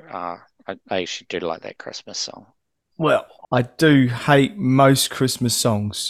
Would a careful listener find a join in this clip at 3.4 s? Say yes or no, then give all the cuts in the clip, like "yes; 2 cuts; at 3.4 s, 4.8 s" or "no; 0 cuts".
yes; 1 cut; at 3.4 s